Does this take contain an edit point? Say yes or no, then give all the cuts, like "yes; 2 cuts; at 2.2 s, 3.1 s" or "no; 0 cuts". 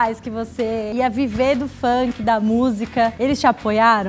yes; 2 cuts; at 0.9 s, 3.2 s